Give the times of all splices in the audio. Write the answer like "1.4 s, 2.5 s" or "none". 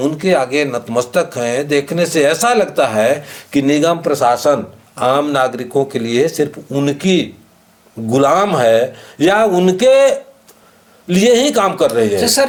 none

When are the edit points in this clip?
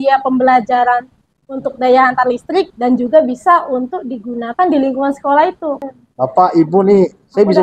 5.8 s

